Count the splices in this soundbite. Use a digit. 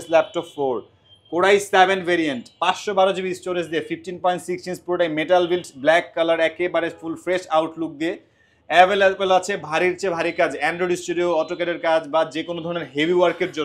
0